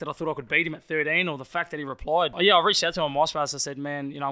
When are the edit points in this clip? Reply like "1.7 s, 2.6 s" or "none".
2.3 s